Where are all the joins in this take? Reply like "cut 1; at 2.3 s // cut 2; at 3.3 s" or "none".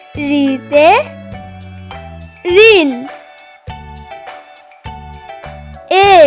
cut 1; at 3.1 s // cut 2; at 5.5 s